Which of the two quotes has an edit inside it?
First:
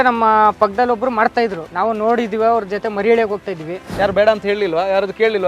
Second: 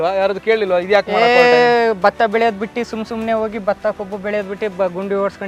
first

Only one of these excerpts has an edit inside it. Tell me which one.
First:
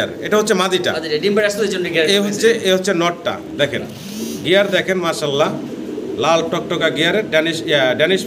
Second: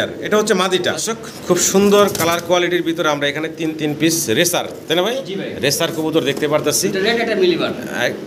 second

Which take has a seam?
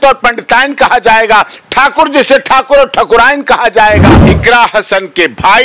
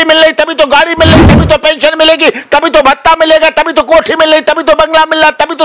first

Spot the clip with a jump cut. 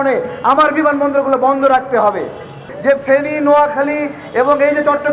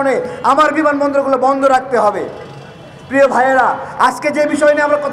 first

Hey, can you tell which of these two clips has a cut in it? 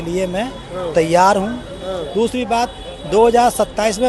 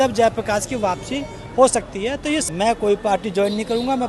second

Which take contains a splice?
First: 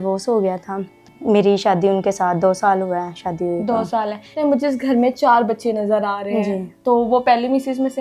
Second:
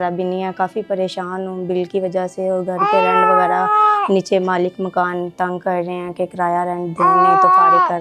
first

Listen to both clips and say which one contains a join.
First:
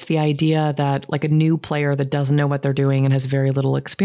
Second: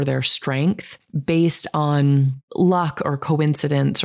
second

